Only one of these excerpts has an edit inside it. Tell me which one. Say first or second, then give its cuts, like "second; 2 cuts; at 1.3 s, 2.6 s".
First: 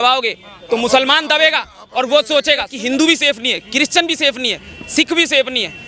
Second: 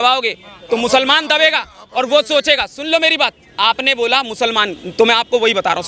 first; 1 cut; at 2.7 s